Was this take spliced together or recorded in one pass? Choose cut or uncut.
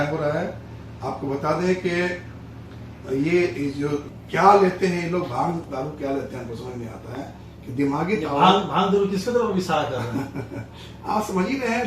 cut